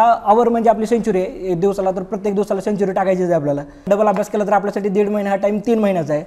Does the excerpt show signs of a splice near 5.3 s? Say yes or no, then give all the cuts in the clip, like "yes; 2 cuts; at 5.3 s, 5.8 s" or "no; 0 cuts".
no; 1 cut; at 3.9 s